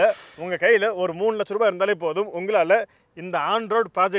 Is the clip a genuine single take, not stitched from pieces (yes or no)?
yes